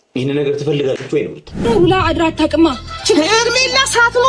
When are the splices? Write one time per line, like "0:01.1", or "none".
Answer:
0:01.5